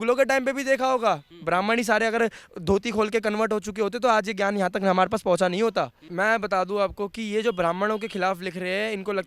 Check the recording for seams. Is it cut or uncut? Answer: cut